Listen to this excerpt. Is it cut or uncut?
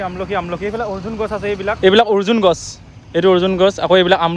uncut